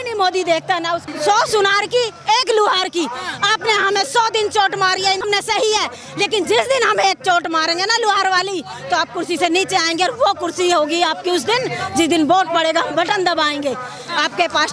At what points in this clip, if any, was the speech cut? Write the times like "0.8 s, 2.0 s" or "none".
1.1 s, 5.2 s